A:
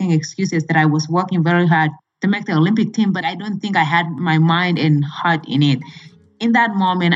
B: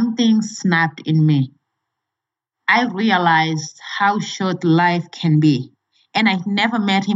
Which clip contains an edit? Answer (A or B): A